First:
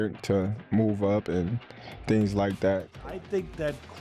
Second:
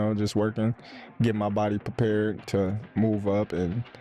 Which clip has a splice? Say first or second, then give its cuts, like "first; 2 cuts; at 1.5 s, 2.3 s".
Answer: first; 1 cut; at 2.9 s